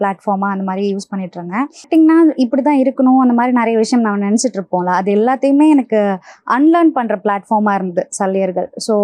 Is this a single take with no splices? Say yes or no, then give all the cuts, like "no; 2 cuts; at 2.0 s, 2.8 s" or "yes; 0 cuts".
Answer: no; 1 cut; at 1.8 s